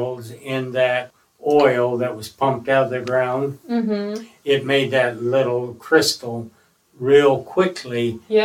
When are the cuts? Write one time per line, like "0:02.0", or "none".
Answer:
0:01.1